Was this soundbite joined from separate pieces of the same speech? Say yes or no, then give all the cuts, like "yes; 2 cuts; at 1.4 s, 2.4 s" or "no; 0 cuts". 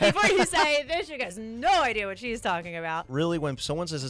yes; 1 cut; at 3.0 s